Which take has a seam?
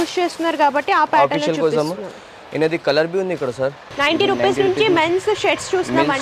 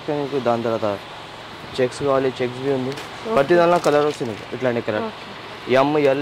first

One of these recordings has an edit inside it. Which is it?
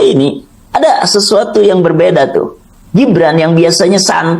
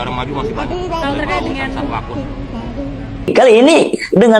second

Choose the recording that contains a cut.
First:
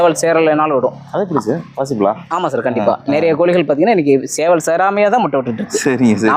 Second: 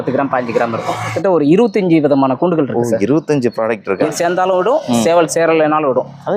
second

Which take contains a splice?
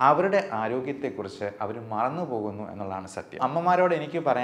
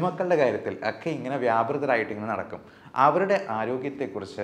first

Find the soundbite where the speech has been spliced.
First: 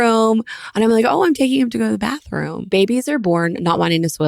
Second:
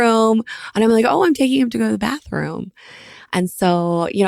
first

